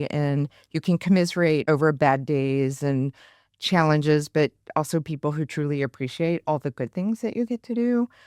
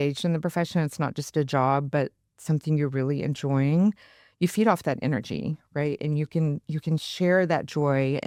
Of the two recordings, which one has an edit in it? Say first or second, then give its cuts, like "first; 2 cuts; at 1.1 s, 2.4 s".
first; 1 cut; at 1.6 s